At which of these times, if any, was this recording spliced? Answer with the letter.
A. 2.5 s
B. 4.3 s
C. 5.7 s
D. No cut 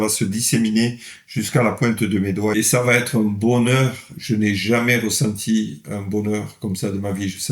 A